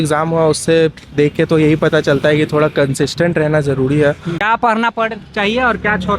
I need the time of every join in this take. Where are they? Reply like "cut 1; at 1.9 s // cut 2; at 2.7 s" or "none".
cut 1; at 4.4 s